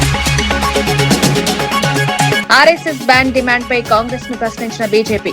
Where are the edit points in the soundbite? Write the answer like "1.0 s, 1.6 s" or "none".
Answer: 2.4 s